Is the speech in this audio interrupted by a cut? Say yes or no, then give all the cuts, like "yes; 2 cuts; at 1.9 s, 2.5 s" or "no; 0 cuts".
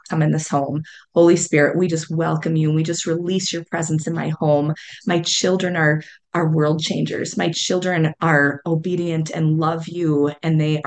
no; 0 cuts